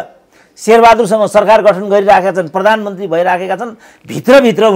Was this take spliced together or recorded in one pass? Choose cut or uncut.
uncut